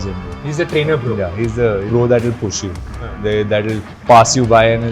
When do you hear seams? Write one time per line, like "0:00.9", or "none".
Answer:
0:01.9
0:03.9